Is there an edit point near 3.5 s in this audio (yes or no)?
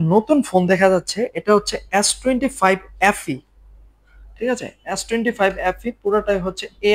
no